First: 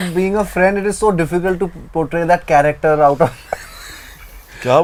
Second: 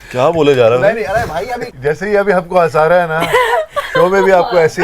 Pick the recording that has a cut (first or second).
second